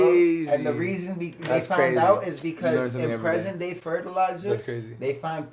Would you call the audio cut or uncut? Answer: uncut